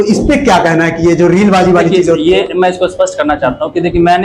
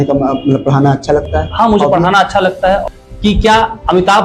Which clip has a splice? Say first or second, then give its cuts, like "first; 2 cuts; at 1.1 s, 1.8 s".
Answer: second; 1 cut; at 2.8 s